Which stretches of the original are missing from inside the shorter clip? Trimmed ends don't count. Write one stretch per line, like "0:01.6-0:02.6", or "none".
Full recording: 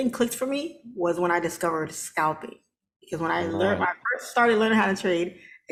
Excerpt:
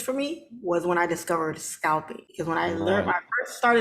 0:02.5-0:02.9